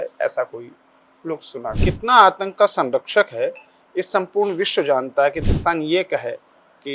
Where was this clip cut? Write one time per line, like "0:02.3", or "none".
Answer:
0:01.7
0:05.4